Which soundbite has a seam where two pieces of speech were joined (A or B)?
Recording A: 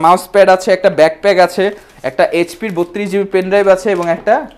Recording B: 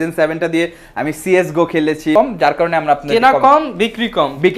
B